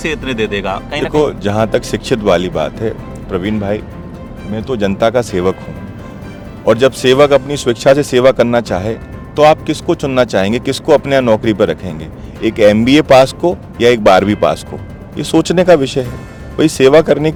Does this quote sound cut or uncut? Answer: uncut